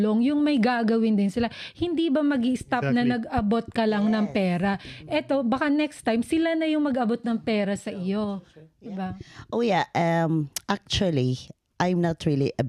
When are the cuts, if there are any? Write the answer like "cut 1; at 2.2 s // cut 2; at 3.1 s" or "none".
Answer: none

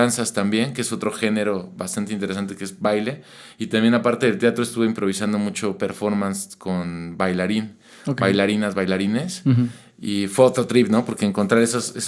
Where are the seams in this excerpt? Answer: none

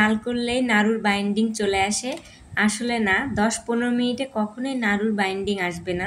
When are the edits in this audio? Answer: none

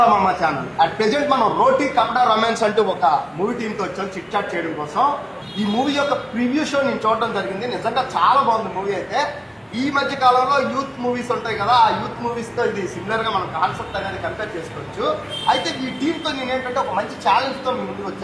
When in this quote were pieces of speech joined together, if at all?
none

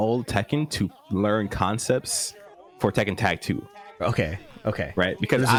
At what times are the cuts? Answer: none

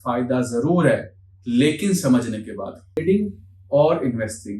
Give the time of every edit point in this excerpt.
cut 1; at 3.0 s

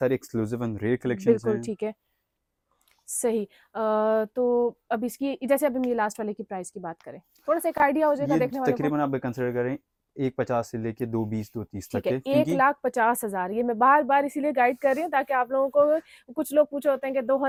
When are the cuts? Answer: none

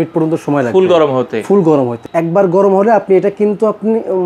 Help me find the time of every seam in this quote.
cut 1; at 2.0 s

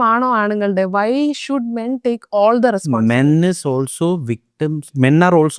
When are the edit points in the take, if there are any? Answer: none

